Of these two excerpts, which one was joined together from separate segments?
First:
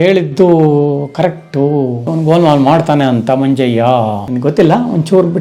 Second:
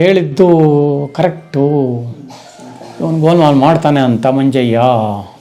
first; 2 cuts; at 2.0 s, 4.2 s

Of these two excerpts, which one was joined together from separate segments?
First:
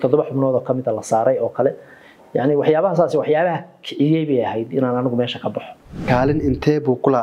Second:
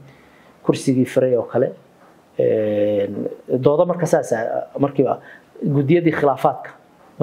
first; 1 cut; at 6.0 s

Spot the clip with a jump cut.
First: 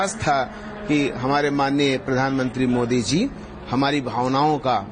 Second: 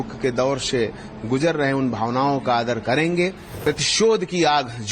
second; 1 cut; at 3.5 s

